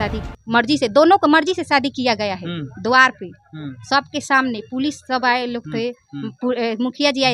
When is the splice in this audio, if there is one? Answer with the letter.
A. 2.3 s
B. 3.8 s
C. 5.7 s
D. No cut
D